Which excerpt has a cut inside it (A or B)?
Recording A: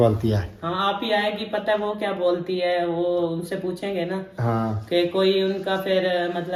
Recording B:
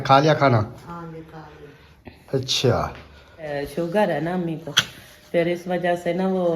B